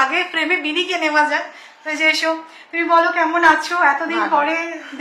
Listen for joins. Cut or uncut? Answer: uncut